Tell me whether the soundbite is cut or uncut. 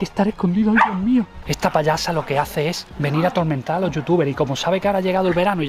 cut